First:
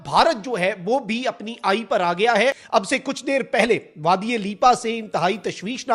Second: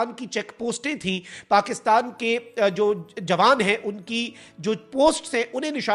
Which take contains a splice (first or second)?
first